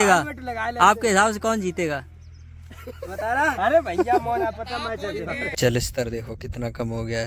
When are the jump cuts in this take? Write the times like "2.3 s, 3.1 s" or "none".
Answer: 5.5 s